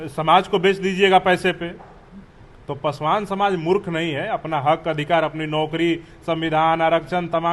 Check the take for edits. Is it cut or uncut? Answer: uncut